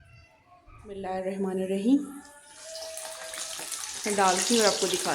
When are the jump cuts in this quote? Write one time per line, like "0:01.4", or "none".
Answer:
0:01.0

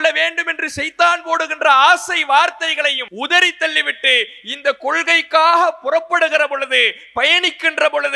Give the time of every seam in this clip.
0:03.0

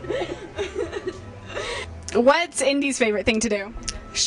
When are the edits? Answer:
0:01.9

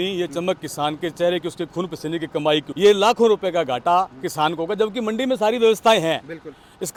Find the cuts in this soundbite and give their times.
none

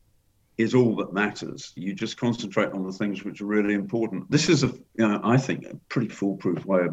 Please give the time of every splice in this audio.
0:01.7
0:04.3

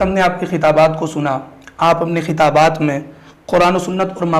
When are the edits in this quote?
none

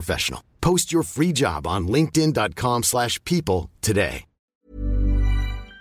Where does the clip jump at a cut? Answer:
0:04.6

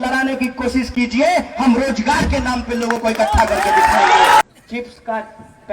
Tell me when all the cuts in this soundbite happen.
0:04.4

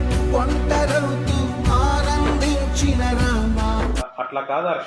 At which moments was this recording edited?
none

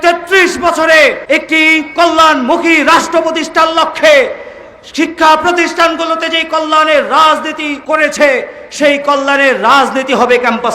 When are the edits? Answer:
0:01.2
0:07.7

